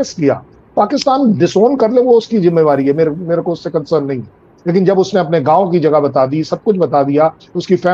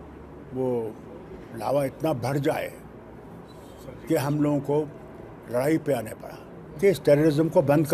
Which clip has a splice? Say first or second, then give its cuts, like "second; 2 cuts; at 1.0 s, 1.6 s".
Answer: second; 1 cut; at 6.8 s